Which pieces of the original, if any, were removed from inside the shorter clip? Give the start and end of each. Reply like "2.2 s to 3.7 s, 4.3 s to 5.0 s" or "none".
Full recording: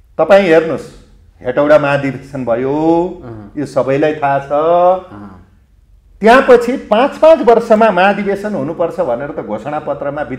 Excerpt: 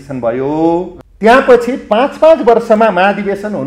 3.3 s to 6.0 s